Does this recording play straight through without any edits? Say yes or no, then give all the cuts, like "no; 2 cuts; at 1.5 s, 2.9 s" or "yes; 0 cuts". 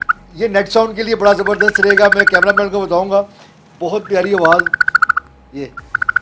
yes; 0 cuts